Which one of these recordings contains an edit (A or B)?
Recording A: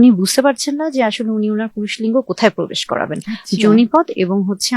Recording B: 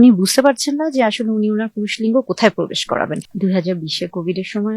B